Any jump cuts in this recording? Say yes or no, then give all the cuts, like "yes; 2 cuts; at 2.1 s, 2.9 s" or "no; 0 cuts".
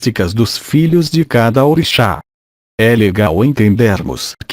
yes; 1 cut; at 1.1 s